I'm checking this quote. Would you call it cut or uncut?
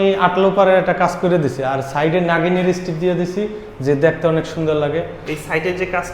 uncut